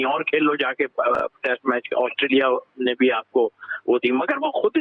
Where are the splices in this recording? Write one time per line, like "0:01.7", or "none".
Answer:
none